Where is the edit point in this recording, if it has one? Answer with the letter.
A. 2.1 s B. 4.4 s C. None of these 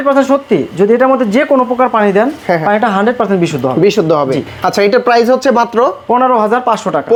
C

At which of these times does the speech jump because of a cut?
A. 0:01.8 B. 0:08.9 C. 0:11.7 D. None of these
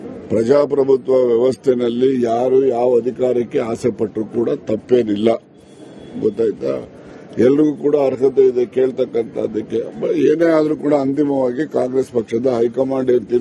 D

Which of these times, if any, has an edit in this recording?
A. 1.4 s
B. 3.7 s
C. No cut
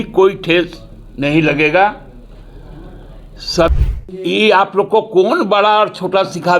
B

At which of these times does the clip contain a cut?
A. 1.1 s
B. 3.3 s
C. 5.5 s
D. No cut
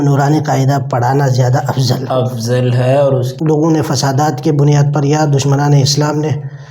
B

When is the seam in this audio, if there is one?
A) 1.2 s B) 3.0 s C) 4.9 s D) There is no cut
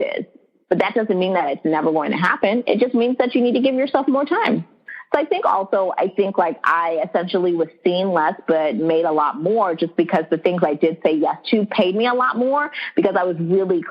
C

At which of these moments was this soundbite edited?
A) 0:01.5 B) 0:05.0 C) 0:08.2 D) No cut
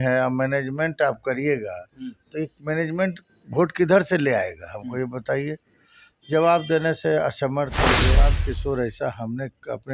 C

